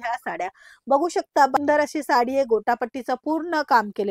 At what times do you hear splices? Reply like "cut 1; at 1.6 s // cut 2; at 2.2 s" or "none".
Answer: cut 1; at 1.6 s